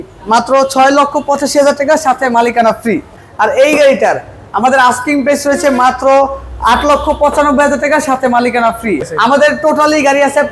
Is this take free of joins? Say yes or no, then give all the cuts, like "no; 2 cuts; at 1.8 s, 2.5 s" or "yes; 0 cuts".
no; 2 cuts; at 3.2 s, 9.1 s